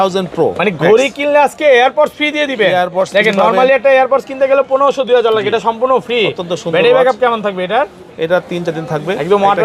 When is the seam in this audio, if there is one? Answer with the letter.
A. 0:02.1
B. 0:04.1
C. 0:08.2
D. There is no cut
D